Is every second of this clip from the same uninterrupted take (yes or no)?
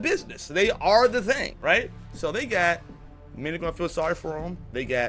no